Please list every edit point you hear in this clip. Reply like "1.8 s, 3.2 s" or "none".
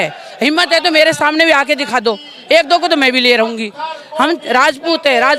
none